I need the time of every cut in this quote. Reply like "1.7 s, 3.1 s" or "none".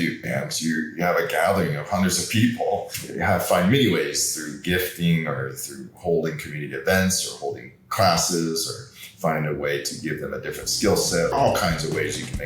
3.0 s, 11.3 s

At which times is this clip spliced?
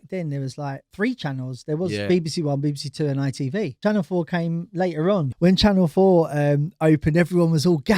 0.9 s, 3.8 s, 5.3 s

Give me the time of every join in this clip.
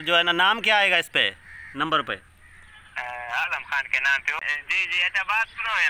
4.4 s

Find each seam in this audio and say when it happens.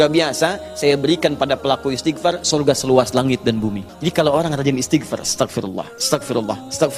3.9 s

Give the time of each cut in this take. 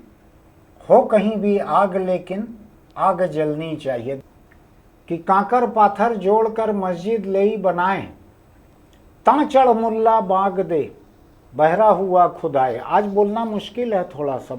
4.2 s

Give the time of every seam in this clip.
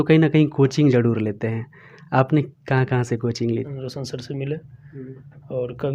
3.7 s

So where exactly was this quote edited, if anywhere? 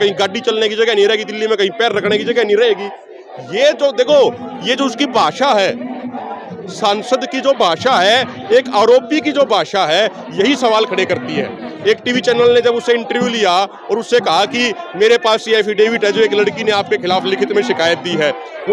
none

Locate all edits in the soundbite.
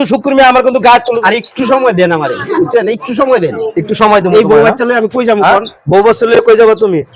1.2 s

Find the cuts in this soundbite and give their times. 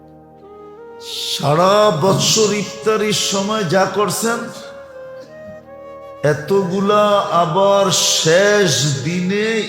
1.0 s, 4.4 s, 6.2 s

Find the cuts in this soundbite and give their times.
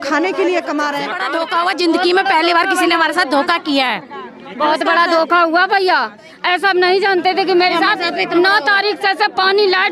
1.2 s

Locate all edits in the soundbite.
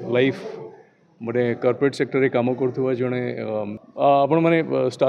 3.8 s

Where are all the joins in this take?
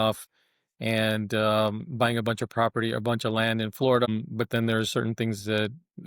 4.1 s

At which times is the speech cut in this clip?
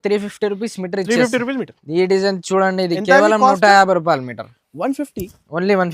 1.8 s

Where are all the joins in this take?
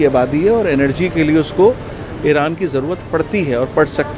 none

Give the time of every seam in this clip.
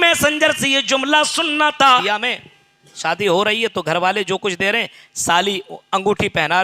2.0 s

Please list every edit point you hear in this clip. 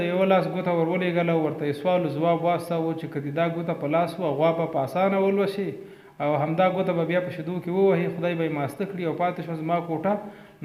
none

